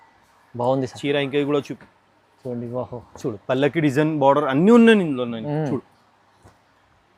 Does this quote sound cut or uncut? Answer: cut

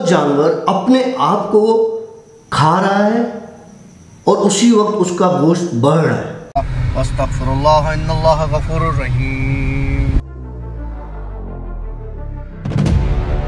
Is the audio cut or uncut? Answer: cut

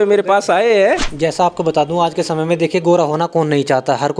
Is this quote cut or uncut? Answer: cut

